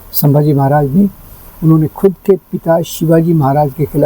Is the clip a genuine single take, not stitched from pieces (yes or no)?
no